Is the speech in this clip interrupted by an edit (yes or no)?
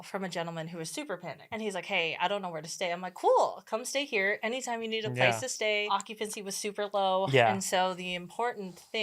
yes